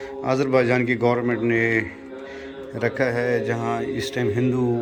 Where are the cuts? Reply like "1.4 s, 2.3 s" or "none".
none